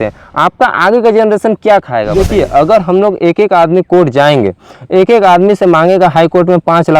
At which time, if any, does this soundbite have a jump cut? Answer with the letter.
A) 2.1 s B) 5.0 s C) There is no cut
A